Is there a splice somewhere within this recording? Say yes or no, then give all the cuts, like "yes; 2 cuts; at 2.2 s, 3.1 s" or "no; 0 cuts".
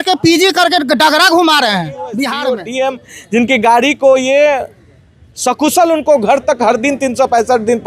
yes; 1 cut; at 2.5 s